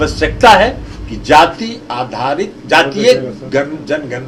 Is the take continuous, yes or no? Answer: yes